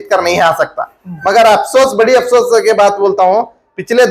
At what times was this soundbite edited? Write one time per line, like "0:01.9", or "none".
none